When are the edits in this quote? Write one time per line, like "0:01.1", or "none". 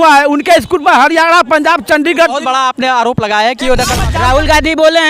0:04.0

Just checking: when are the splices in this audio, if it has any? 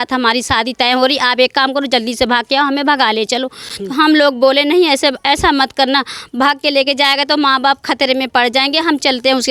none

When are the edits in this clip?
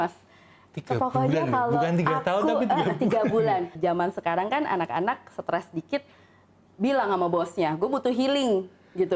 0:03.8

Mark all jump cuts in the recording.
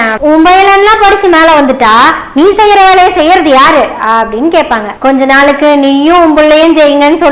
none

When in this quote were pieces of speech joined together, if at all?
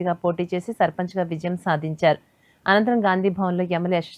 none

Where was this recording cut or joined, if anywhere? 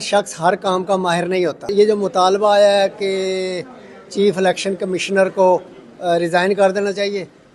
0:01.7

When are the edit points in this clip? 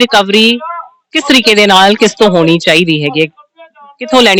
none

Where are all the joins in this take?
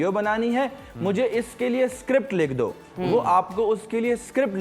none

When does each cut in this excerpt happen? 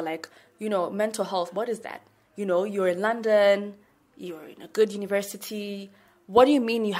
none

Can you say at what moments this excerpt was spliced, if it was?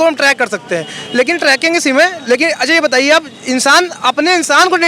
none

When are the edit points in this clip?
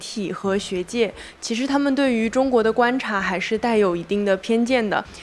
none

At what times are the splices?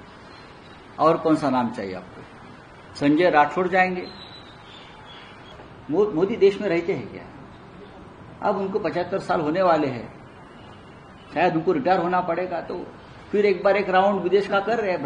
0:05.5

